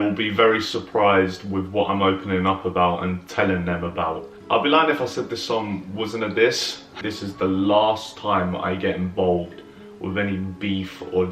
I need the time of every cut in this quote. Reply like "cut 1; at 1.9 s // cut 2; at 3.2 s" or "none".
cut 1; at 4.3 s // cut 2; at 7.1 s

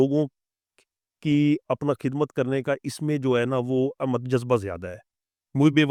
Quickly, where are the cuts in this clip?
none

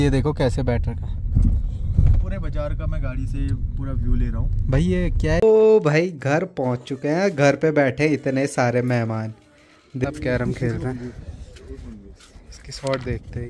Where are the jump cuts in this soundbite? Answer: cut 1; at 5.4 s // cut 2; at 10.0 s

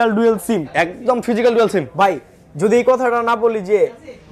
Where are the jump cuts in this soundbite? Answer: none

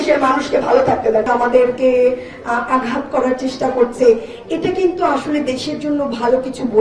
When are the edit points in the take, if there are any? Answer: cut 1; at 1.3 s

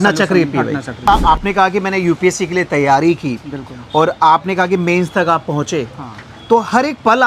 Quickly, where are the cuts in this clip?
cut 1; at 1.0 s

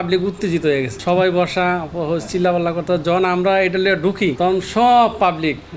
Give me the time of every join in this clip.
cut 1; at 0.9 s // cut 2; at 4.4 s

